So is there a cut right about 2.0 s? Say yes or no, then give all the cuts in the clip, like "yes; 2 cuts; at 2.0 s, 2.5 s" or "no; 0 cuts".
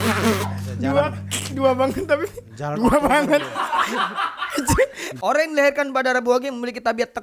no; 1 cut; at 5.0 s